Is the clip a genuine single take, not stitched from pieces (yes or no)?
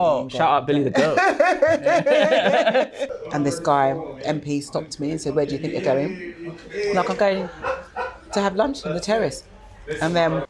no